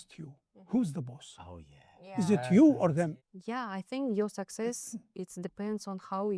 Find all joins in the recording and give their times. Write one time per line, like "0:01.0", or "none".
0:03.1

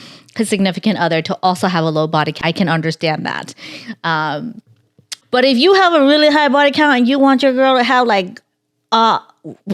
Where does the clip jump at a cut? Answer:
0:02.3
0:05.1

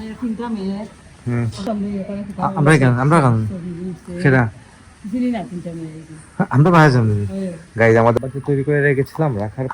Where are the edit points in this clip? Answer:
0:01.7
0:08.1

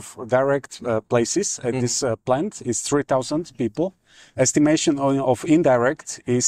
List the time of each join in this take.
none

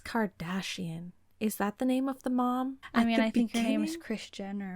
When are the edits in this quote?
0:02.8

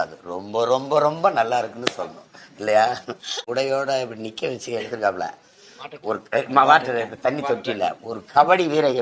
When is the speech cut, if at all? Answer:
0:03.5

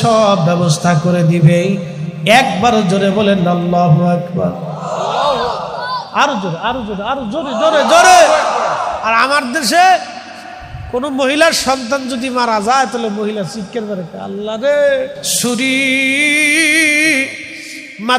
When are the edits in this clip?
0:15.4

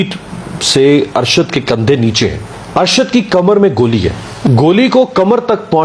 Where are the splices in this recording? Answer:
0:02.4
0:04.3

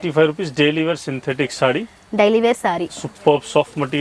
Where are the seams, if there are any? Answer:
none

